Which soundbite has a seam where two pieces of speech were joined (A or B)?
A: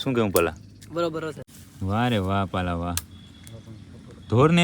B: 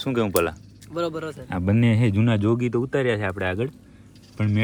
A